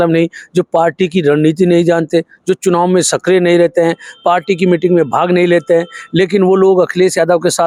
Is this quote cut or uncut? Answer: uncut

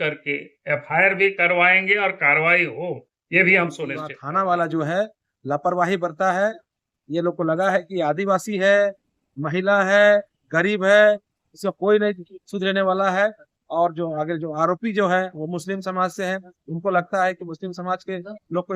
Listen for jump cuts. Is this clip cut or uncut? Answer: cut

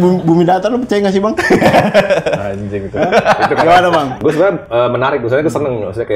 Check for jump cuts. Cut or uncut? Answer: cut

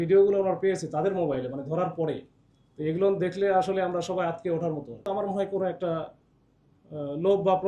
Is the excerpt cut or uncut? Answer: cut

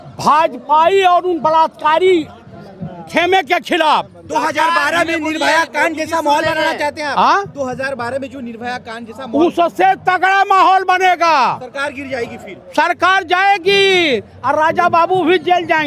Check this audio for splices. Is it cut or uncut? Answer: uncut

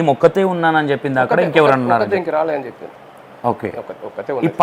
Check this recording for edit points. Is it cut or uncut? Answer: uncut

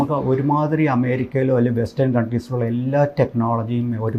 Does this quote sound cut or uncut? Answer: uncut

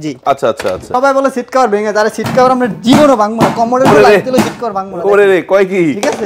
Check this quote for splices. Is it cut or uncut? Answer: cut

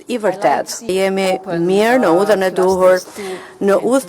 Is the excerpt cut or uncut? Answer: cut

